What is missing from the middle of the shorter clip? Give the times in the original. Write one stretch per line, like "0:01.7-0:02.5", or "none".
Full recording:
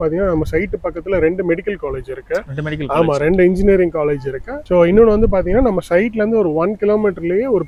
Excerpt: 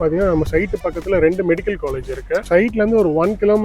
0:02.5-0:05.9